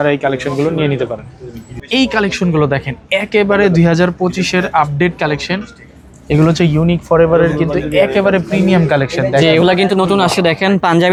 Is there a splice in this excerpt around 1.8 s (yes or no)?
no